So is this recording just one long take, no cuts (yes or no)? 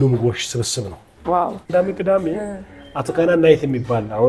no